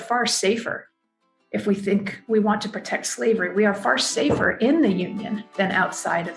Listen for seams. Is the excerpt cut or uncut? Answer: uncut